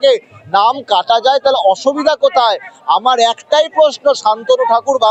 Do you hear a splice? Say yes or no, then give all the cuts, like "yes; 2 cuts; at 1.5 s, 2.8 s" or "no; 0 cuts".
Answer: no; 0 cuts